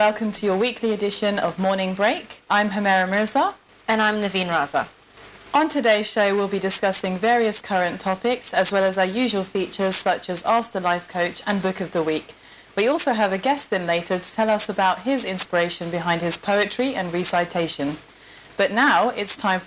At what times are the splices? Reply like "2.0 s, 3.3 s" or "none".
8.5 s